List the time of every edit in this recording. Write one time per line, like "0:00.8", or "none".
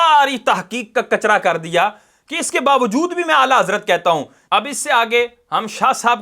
0:04.4